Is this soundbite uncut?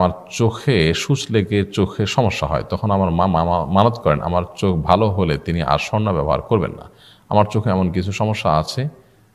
yes; 0 cuts

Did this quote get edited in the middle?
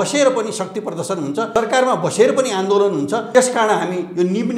yes; 2 cuts; at 1.5 s, 3.2 s

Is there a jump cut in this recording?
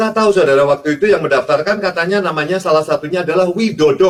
no; 0 cuts

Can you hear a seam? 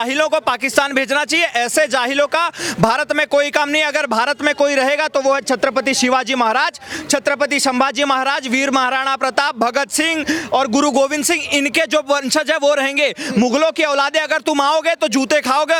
no; 0 cuts

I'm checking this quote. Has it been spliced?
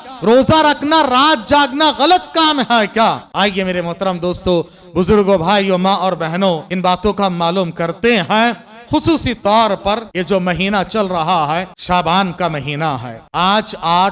yes; 5 cuts; at 3.3 s, 6.7 s, 10.1 s, 11.7 s, 13.2 s

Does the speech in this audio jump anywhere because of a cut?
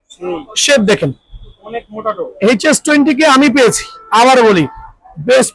no; 0 cuts

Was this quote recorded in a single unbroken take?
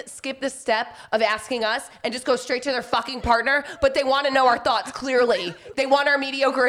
yes; 0 cuts

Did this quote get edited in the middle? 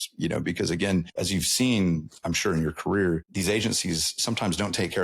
yes; 2 cuts; at 1.1 s, 3.3 s

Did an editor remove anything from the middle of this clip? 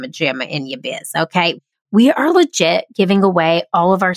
yes; 1 cut; at 1.5 s

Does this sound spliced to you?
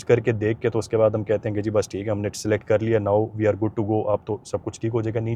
no; 0 cuts

